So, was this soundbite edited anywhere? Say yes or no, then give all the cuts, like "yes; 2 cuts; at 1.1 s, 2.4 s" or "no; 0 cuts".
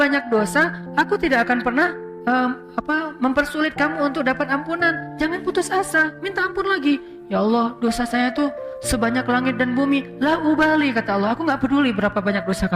yes; 1 cut; at 2.1 s